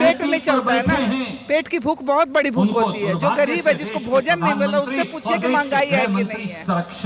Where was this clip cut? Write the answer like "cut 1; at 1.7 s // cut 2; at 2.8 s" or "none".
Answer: none